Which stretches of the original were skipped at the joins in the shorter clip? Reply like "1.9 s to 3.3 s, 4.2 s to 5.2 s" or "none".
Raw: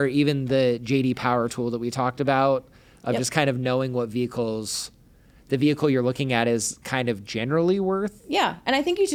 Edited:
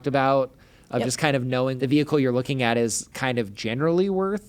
3.9 s to 5.5 s